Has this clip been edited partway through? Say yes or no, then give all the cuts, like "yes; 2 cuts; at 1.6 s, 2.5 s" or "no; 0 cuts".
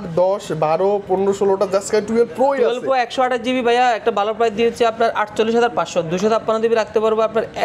no; 0 cuts